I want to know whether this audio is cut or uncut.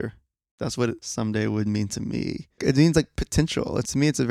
cut